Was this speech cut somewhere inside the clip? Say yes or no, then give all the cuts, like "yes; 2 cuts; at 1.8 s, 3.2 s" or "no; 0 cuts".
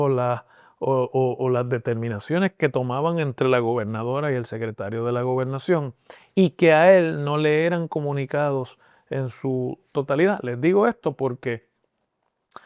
no; 0 cuts